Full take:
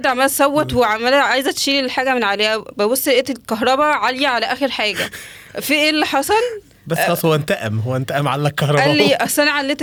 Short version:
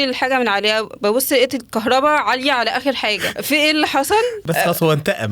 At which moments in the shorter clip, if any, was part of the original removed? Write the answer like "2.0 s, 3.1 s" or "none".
3.3 s, 4.4 s